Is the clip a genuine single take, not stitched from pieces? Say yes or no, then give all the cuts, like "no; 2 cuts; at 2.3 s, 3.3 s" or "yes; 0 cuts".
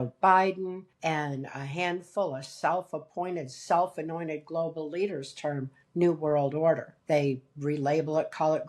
no; 3 cuts; at 0.9 s, 5.8 s, 6.9 s